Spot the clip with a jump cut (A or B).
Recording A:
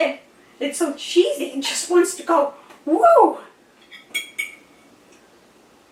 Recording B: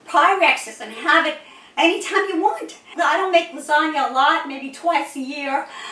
B